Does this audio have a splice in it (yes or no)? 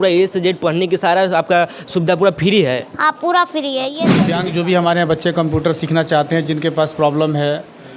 yes